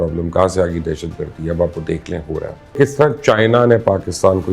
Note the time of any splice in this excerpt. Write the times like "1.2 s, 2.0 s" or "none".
2.7 s

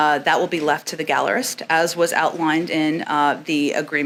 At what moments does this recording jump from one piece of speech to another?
none

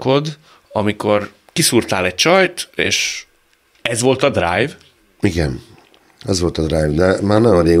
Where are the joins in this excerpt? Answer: none

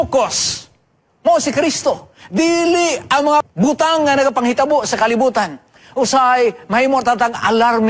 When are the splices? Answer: 3.5 s

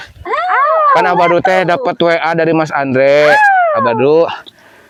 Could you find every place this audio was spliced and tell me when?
none

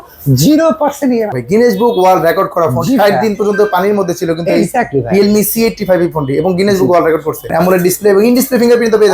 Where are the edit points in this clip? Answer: 1.4 s, 7.5 s

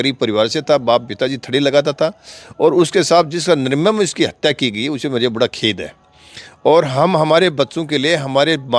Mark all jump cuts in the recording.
none

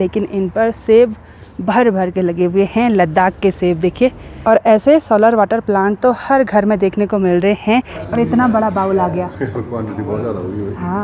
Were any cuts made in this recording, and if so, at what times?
4.3 s, 8.0 s

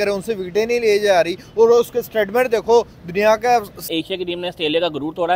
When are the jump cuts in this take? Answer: 3.8 s

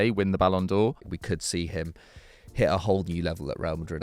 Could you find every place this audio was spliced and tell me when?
1.1 s

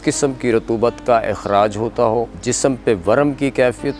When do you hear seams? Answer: 2.3 s

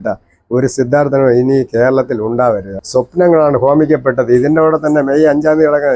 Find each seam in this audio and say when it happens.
2.7 s

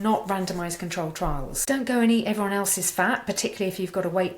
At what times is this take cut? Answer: 1.5 s

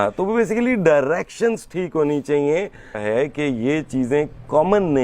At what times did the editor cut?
3.0 s

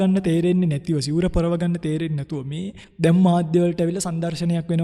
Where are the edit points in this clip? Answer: 2.8 s

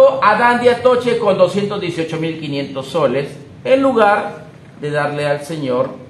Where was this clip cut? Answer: none

